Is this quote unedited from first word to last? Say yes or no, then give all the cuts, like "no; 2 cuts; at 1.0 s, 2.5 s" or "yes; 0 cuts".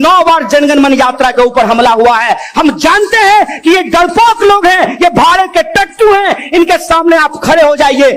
yes; 0 cuts